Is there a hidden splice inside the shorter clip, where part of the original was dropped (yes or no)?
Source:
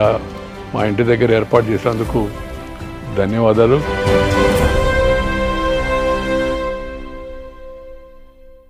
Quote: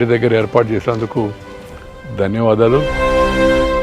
yes